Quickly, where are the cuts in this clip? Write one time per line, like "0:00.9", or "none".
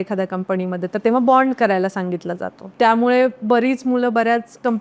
0:02.7